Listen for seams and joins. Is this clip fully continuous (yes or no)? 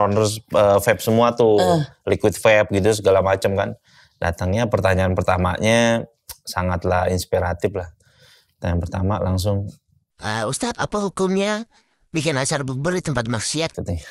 yes